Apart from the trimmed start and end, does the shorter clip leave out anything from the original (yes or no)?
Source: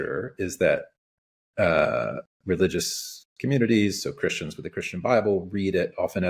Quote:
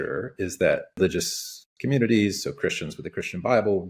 yes